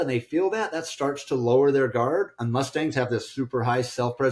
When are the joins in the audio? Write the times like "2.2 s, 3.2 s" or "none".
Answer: none